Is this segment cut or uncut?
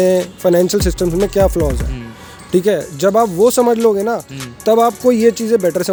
uncut